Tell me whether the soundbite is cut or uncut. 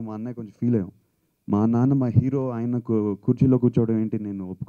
uncut